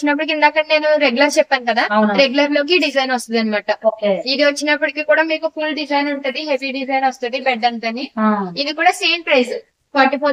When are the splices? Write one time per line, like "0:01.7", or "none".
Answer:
none

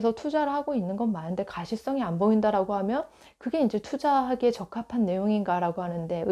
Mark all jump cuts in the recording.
none

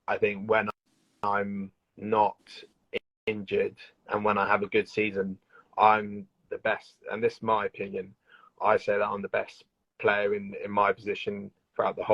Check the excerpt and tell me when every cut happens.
none

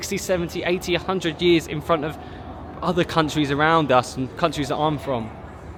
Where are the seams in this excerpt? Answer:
none

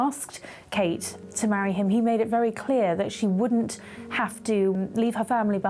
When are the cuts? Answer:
0:01.2
0:04.7

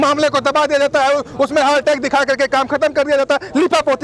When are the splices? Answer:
none

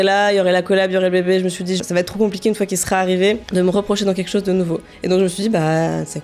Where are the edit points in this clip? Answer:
0:01.8
0:03.4
0:04.9

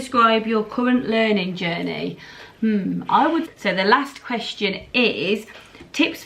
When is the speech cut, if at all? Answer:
0:03.5

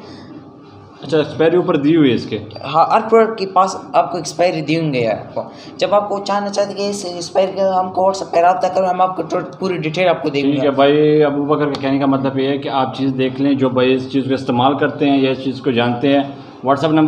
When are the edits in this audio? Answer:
none

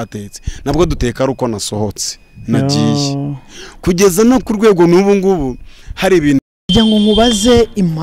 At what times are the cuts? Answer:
0:06.4

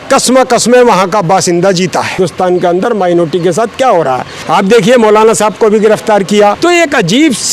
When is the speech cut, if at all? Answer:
0:02.2
0:04.3
0:06.6

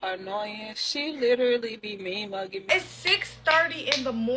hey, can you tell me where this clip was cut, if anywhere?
0:02.7

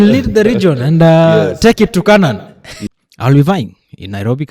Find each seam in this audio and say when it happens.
0:02.8

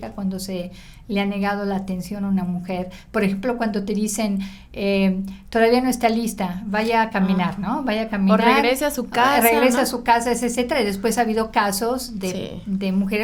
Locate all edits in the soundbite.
none

